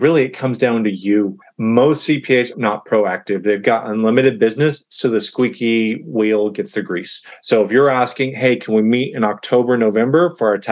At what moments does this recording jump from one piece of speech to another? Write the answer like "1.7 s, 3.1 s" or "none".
none